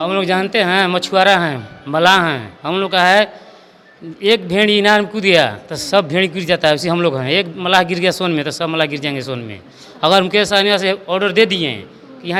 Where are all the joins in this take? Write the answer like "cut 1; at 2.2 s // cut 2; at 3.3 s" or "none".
none